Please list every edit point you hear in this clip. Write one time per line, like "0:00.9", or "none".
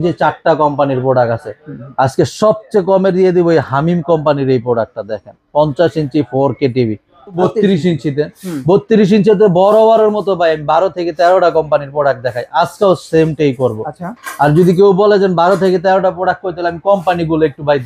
0:07.4

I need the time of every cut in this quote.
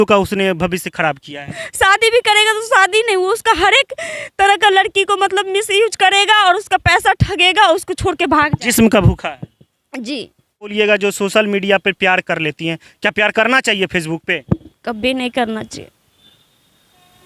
0:01.6
0:10.7

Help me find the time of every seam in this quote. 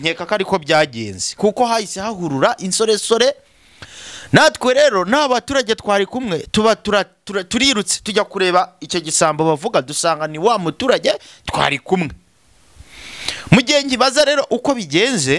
none

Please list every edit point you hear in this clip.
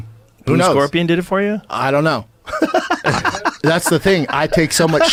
none

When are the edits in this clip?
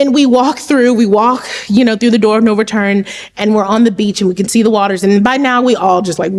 none

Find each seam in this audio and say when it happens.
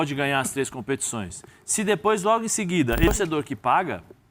0:03.1

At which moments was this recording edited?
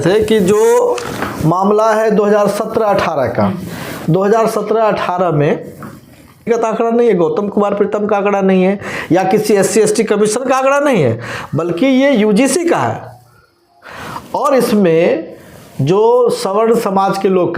0:06.5

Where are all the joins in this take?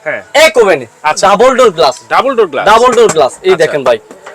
0:01.2

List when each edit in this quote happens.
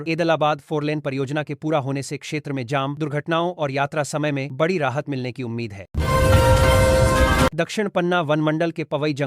0:05.8
0:07.6

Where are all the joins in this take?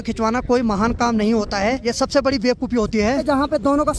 0:01.8
0:03.2

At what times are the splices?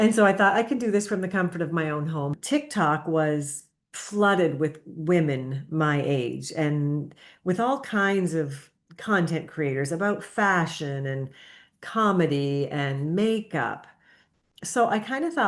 0:02.3

